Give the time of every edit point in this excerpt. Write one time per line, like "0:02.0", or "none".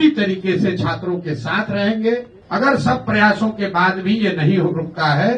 0:02.4

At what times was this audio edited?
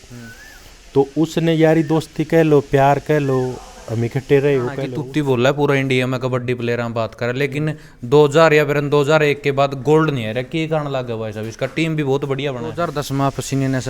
0:04.9
0:12.7

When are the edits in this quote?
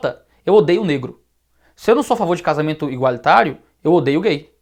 none

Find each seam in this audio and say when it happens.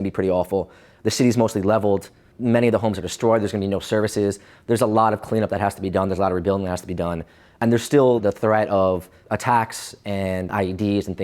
0:02.3
0:07.6
0:08.2
0:09.2
0:10.5

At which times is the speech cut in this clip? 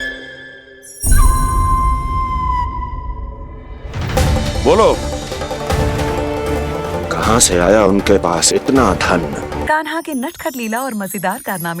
0:09.6

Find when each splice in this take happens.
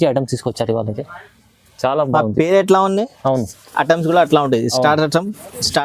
none

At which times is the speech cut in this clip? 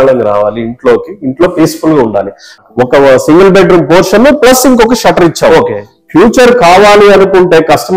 0:02.6

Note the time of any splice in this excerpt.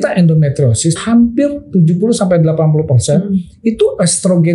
0:01.0

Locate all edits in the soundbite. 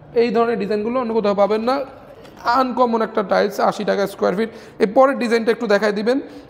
none

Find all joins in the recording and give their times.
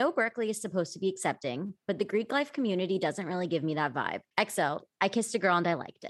0:04.2

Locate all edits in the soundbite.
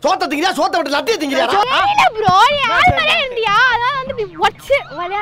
0:01.7

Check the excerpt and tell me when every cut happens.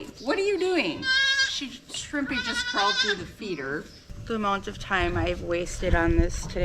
0:04.1

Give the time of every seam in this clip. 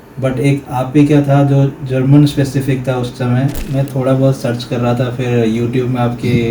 0:03.6

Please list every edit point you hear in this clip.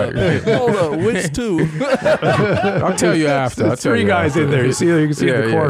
none

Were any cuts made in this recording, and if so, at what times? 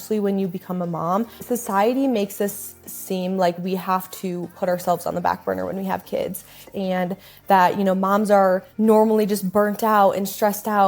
0:01.4
0:06.6
0:08.7

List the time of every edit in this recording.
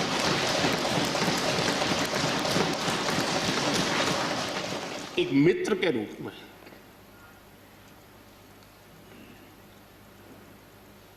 0:04.8

